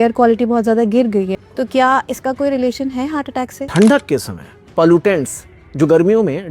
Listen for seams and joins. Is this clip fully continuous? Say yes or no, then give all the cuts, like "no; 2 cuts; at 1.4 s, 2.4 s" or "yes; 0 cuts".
no; 2 cuts; at 1.4 s, 3.6 s